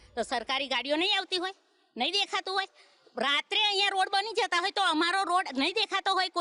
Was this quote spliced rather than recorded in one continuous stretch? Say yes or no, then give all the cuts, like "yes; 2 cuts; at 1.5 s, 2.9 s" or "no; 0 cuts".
no; 0 cuts